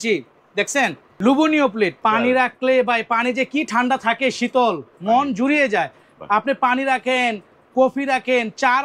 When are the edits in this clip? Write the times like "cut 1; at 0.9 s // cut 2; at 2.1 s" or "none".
cut 1; at 1.0 s // cut 2; at 2.0 s